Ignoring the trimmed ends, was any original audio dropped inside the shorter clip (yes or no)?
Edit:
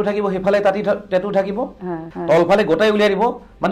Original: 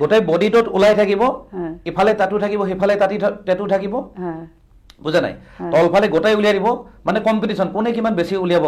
yes